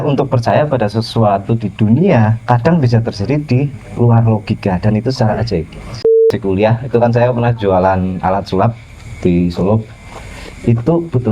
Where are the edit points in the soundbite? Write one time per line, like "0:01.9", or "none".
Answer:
0:06.2